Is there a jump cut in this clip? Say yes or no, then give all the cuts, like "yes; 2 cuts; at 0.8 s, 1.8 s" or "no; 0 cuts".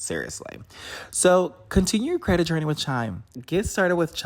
yes; 1 cut; at 3.2 s